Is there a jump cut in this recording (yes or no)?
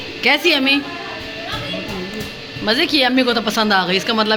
no